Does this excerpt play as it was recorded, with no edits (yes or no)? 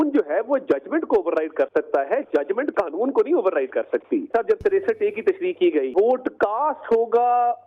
no